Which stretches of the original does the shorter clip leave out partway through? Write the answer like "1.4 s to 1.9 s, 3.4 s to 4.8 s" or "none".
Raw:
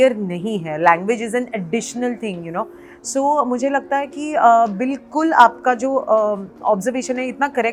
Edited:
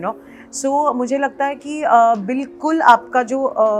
none